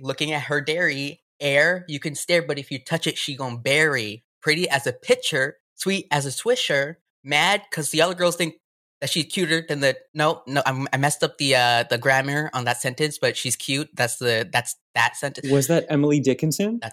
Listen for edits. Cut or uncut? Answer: cut